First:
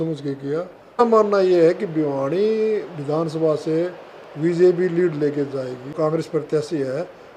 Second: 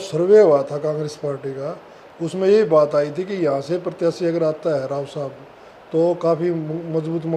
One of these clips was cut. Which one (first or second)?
first